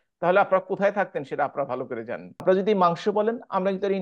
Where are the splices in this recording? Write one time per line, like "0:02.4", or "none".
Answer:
0:02.4

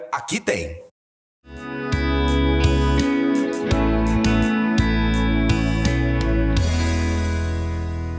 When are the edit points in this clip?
0:01.7

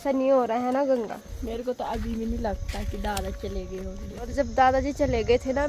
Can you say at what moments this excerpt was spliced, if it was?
0:01.3
0:04.3

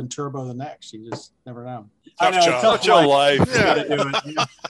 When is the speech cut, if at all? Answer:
0:02.0

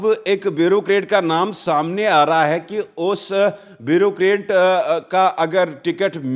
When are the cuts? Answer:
none

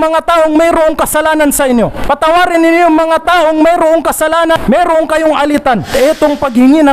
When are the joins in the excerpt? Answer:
0:02.0
0:04.6
0:05.9

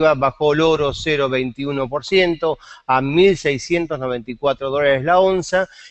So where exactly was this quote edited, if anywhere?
none

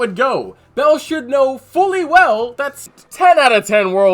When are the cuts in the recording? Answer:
0:02.8

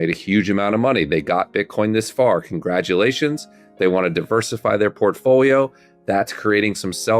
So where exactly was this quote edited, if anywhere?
none

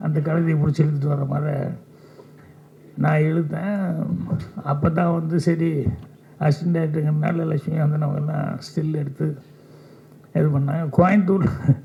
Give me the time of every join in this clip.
none

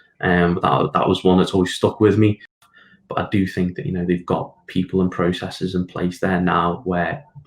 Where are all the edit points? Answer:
0:02.6

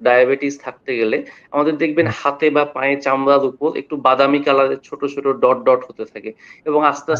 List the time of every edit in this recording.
none

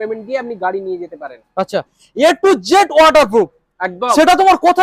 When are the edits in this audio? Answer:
0:02.0

